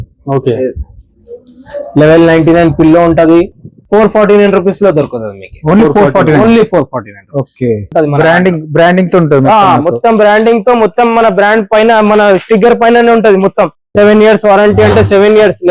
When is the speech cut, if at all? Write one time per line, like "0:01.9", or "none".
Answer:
0:07.9